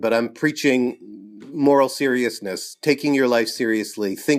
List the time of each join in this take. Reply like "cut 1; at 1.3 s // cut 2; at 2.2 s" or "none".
none